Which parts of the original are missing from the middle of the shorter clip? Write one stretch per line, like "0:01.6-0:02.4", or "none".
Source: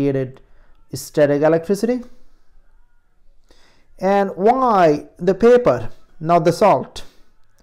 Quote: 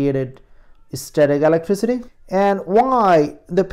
0:02.1-0:03.8

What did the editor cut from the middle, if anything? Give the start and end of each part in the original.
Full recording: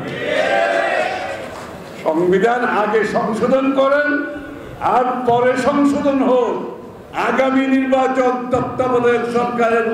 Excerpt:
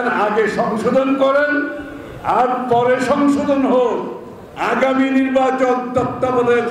none

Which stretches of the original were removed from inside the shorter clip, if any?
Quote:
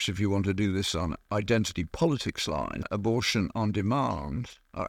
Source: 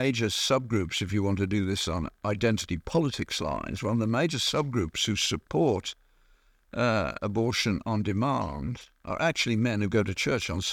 0:03.8-0:07.1

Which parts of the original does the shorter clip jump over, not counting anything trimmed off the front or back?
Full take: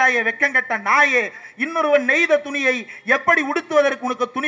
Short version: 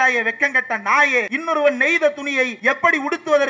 0:01.3-0:01.6
0:02.8-0:03.0

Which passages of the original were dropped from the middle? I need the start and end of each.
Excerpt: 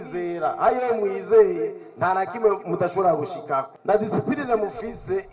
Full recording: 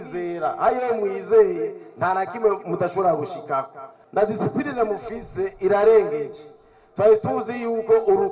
0:03.7-0:04.0

